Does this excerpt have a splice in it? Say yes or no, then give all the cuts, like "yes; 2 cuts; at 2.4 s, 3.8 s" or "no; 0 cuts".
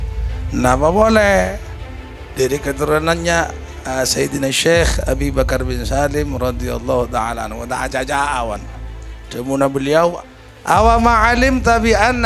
yes; 1 cut; at 10.2 s